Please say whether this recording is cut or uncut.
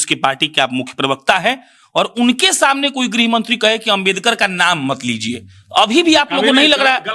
uncut